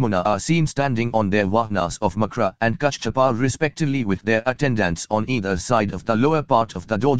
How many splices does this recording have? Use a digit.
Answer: 0